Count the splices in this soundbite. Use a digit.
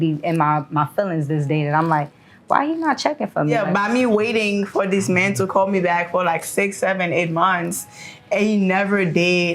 1